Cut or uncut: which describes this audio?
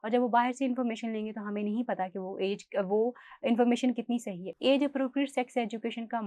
uncut